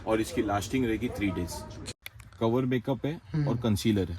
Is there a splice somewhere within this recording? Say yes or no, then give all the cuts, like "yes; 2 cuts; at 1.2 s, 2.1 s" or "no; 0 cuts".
yes; 1 cut; at 1.9 s